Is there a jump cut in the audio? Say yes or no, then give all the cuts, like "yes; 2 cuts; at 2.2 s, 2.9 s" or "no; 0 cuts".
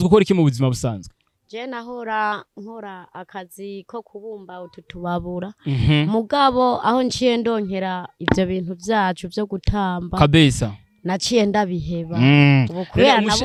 no; 0 cuts